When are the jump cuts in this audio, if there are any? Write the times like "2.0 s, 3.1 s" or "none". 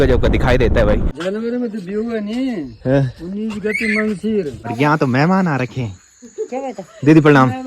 1.1 s, 4.6 s

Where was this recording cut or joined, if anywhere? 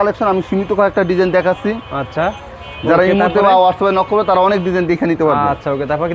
none

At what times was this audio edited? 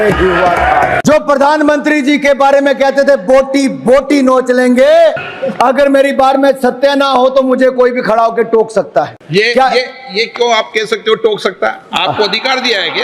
1.0 s, 5.3 s, 9.2 s

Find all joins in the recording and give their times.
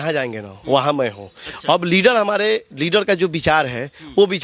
none

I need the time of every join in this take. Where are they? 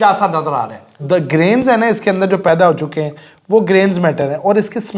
1.0 s

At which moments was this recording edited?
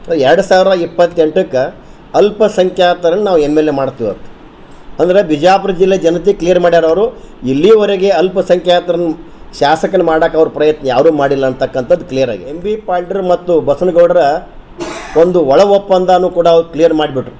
12.7 s

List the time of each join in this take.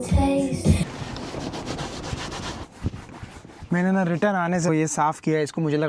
0.9 s, 4.7 s

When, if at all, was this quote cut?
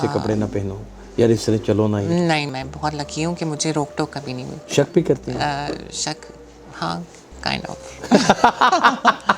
2.5 s, 4.6 s

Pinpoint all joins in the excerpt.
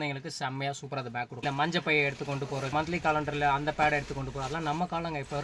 1.3 s, 2.7 s

